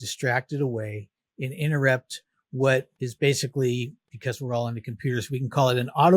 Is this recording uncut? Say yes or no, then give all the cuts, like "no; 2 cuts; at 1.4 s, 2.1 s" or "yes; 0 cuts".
no; 2 cuts; at 3.0 s, 4.0 s